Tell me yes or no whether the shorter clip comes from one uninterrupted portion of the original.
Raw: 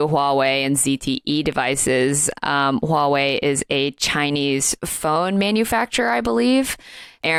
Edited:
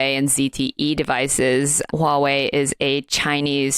no